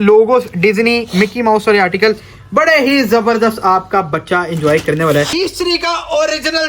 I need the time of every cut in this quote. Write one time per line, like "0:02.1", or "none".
0:05.3